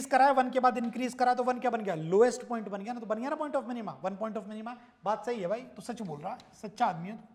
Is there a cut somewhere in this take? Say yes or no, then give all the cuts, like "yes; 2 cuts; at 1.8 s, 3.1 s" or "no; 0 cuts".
no; 0 cuts